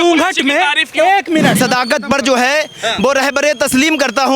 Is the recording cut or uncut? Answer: cut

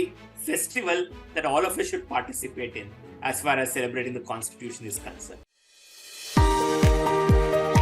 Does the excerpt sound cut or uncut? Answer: cut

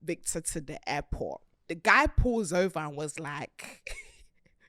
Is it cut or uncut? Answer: cut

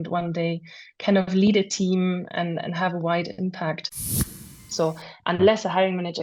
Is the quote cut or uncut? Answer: cut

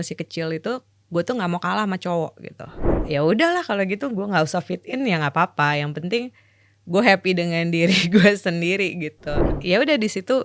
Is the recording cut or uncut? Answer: cut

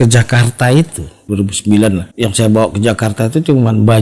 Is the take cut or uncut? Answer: cut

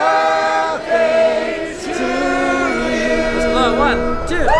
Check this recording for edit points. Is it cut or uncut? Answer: uncut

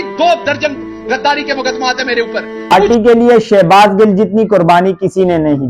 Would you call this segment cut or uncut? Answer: cut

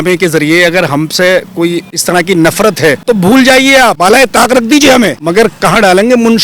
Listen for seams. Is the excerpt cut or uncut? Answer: cut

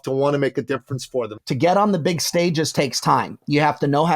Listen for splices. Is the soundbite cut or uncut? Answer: cut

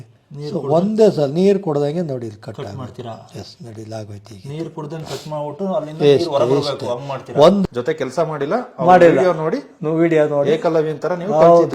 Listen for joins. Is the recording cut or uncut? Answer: cut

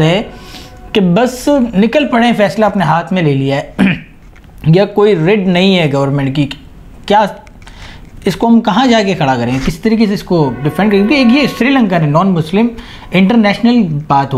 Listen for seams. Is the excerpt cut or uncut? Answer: uncut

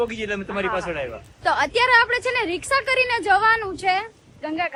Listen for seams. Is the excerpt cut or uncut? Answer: uncut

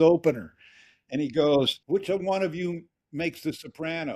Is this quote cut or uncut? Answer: cut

